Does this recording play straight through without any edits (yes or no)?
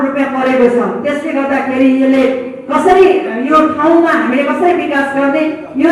yes